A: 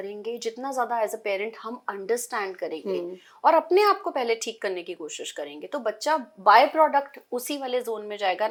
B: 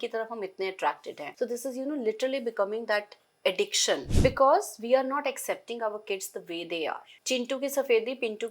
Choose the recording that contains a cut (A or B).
B